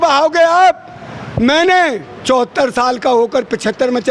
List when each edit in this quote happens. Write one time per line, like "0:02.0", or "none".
none